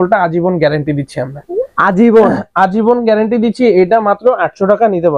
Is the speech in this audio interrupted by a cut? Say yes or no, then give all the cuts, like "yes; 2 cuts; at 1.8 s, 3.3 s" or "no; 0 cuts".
no; 0 cuts